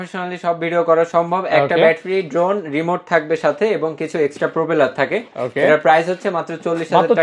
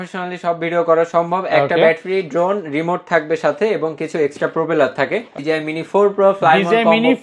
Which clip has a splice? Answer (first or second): second